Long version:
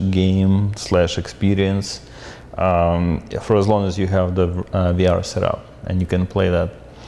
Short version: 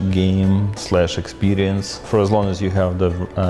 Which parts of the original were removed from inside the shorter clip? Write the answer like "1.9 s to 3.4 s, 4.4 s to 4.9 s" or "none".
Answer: 2.0 s to 3.3 s